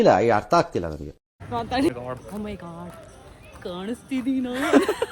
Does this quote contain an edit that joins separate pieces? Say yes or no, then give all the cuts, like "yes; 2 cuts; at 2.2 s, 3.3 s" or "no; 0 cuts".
yes; 1 cut; at 1.9 s